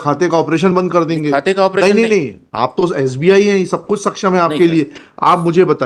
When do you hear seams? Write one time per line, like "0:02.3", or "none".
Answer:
none